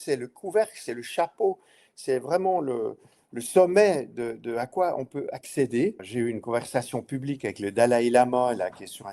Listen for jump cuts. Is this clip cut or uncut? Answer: cut